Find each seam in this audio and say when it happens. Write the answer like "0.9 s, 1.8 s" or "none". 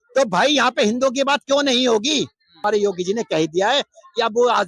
2.6 s